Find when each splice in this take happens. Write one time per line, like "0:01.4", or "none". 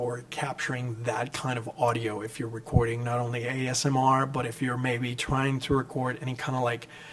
none